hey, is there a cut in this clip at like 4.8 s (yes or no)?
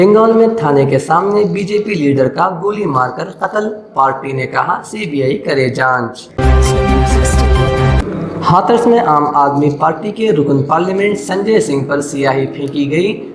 no